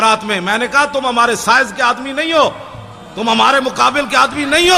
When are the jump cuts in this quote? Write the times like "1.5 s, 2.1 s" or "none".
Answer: none